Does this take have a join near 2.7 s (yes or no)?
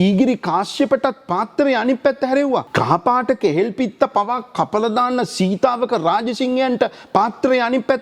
yes